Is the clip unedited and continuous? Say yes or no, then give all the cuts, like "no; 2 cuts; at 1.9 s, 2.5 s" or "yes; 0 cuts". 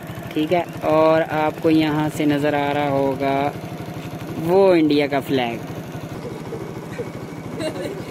no; 1 cut; at 6.2 s